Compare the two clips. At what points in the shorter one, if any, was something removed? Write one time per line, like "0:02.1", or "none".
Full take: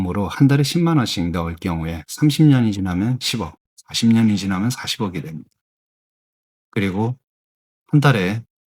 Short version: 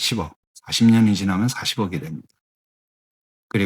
none

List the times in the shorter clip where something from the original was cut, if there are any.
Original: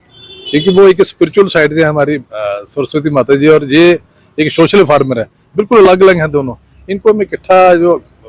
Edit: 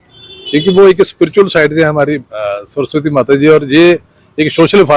none

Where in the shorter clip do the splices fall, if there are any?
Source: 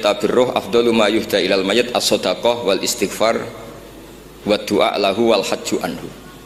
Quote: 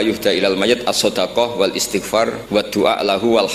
0:02.4

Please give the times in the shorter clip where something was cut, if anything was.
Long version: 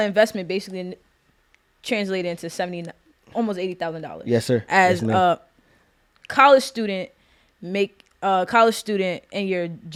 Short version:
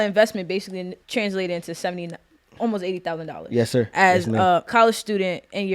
0:01.0
0:04.7

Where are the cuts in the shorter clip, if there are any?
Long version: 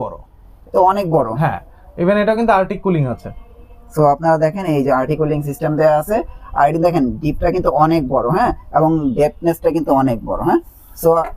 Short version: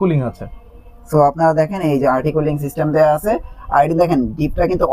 none

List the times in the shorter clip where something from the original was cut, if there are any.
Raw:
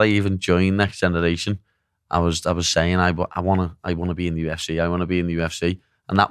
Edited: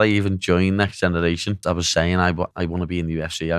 0:01.6
0:02.5

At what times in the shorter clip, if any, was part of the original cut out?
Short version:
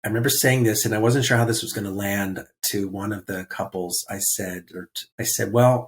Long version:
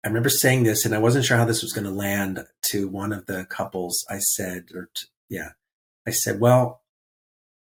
0:05.0

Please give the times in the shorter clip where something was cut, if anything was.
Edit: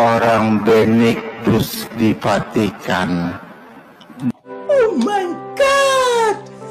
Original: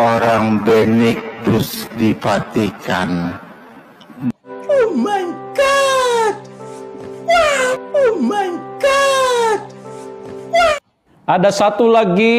0:04.9

